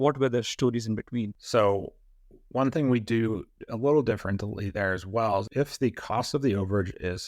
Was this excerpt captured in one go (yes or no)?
no